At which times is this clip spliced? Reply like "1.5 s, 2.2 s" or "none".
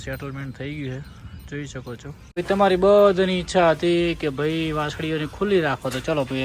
2.2 s